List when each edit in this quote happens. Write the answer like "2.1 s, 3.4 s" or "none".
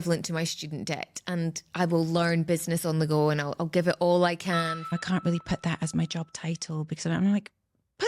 4.8 s